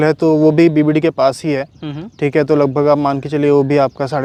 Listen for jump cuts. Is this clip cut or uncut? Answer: uncut